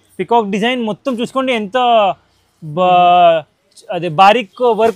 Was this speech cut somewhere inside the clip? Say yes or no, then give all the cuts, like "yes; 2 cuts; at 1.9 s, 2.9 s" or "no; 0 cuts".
no; 0 cuts